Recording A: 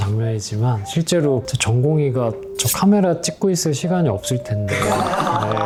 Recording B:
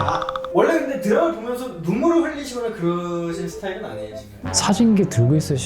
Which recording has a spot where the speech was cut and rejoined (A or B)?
B